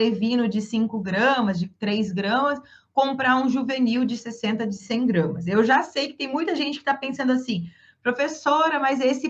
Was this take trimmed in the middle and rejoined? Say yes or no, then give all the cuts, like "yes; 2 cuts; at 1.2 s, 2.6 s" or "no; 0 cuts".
no; 0 cuts